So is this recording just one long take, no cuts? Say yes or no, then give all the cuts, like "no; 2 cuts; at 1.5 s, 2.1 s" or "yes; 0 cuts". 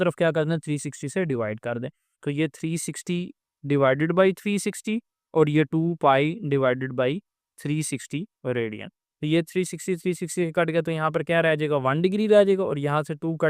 yes; 0 cuts